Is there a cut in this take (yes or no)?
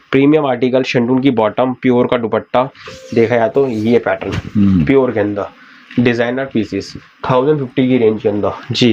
no